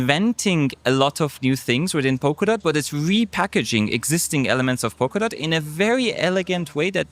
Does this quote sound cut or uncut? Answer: uncut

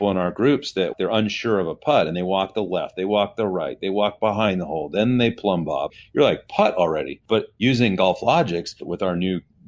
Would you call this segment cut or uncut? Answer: cut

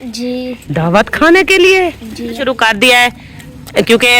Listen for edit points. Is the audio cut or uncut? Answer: cut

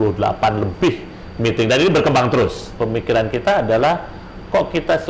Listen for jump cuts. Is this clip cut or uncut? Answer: cut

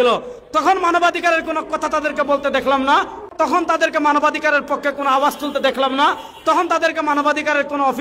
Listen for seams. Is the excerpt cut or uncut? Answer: cut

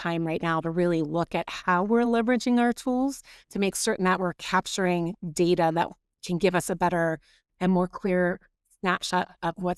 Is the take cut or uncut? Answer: uncut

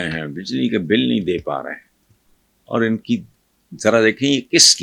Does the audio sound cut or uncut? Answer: uncut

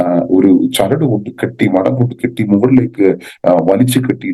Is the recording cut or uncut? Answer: uncut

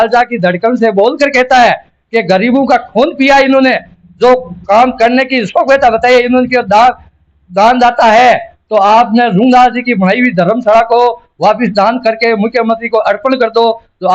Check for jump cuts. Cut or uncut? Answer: uncut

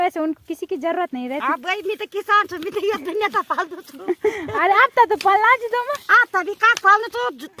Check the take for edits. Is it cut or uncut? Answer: uncut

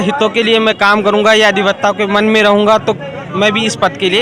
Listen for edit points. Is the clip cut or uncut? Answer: uncut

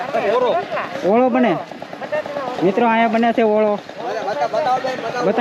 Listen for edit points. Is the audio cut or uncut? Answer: uncut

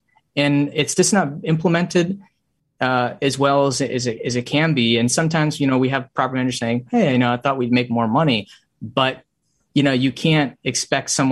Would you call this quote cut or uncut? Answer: uncut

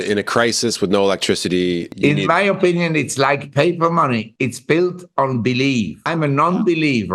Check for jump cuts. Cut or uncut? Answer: cut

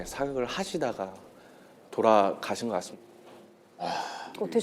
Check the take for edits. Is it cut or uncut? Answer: uncut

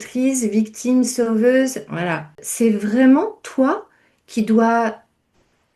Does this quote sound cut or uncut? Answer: cut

